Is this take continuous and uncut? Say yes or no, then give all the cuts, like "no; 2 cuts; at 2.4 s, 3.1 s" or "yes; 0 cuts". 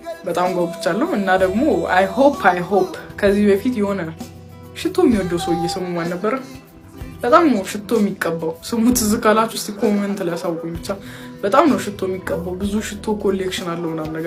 yes; 0 cuts